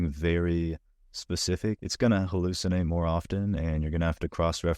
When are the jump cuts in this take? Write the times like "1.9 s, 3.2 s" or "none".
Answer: 1.8 s